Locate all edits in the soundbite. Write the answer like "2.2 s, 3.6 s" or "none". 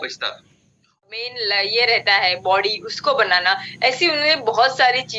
1.0 s